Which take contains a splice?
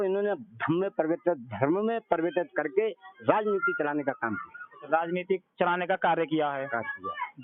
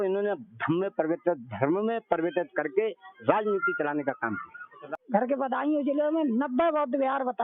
second; 1 cut; at 4.7 s

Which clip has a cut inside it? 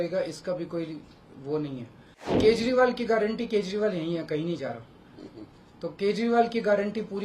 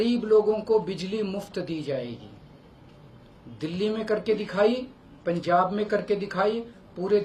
first; 1 cut; at 2.4 s

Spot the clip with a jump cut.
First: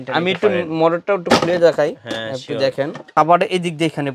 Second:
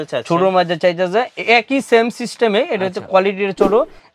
first; 1 cut; at 3.1 s

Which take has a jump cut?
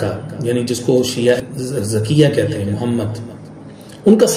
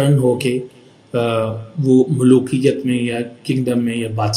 first; 1 cut; at 1.4 s

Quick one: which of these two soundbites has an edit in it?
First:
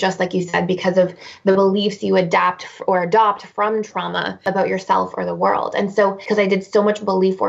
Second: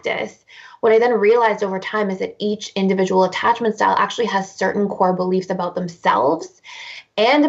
first; 2 cuts; at 4.4 s, 5.9 s

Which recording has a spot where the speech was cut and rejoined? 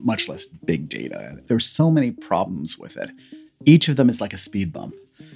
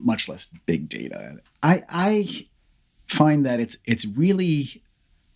first; 2 cuts; at 1.4 s, 3.6 s

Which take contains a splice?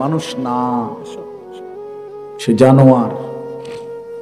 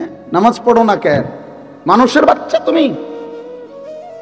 first; 2 cuts; at 0.9 s, 2.4 s

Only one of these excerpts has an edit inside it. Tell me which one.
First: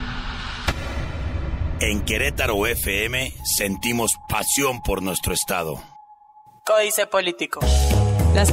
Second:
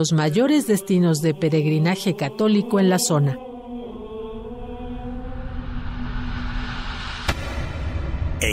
first; 1 cut; at 6.6 s

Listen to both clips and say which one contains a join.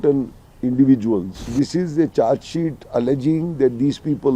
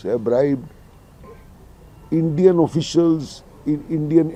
first; 1 cut; at 1.5 s

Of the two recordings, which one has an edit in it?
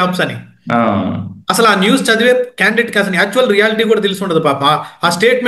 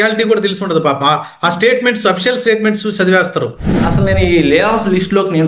second; 1 cut; at 3.9 s

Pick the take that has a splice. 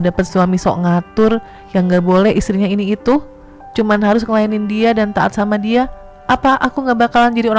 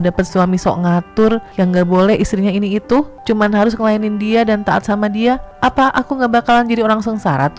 second; 3 cuts; at 1.5 s, 3.1 s, 5.5 s

